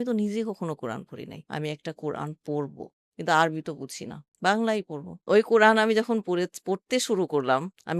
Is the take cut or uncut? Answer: cut